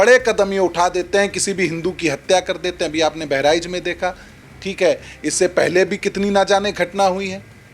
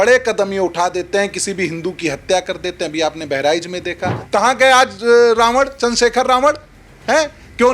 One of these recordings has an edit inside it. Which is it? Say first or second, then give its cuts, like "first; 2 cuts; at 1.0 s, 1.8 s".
second; 1 cut; at 4.2 s